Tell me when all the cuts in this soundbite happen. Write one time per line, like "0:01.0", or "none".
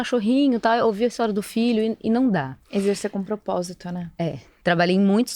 0:04.5